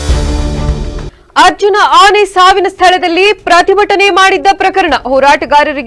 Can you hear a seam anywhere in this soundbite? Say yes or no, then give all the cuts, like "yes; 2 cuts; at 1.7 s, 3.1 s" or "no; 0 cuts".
no; 0 cuts